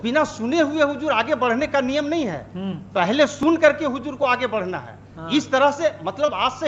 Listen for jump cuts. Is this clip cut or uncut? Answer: uncut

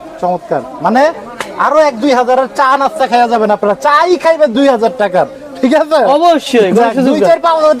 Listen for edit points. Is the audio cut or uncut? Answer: uncut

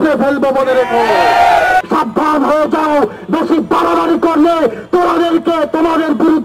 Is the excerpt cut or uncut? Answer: cut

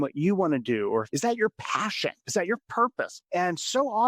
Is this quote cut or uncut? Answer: cut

